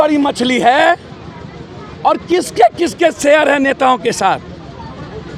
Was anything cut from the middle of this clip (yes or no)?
no